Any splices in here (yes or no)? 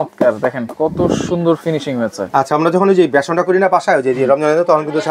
no